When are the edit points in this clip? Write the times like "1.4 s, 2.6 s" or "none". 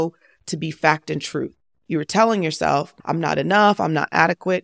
2.9 s